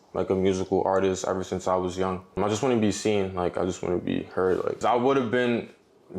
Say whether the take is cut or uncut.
cut